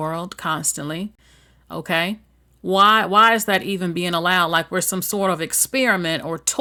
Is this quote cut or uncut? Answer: uncut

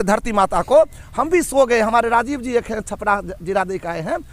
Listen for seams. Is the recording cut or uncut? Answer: uncut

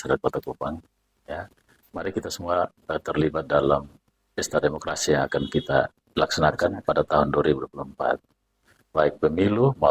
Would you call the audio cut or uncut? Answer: uncut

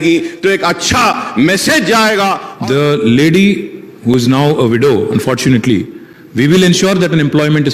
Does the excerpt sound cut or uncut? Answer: cut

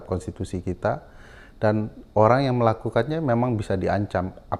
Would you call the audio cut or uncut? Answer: uncut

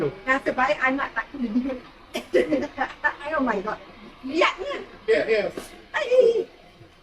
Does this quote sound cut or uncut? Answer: uncut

